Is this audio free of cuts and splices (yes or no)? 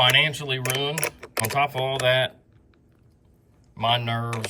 no